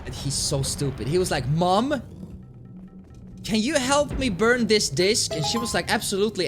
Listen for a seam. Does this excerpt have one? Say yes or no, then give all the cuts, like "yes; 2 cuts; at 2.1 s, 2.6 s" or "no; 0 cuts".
yes; 1 cut; at 5.2 s